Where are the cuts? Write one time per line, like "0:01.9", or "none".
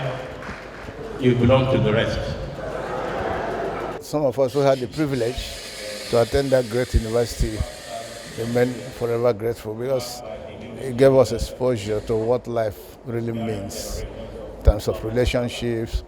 0:03.8